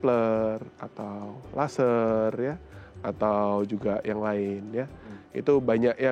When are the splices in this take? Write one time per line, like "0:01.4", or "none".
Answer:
none